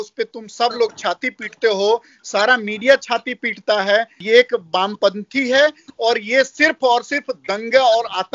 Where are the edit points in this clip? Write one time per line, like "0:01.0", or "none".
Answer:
0:04.2